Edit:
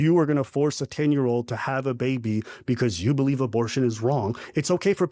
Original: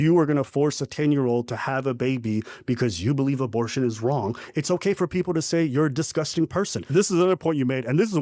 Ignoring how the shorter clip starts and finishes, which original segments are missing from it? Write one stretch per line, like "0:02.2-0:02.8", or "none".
none